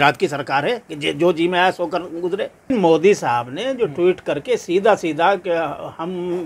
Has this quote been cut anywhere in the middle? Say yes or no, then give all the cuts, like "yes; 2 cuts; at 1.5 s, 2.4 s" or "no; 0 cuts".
yes; 1 cut; at 2.7 s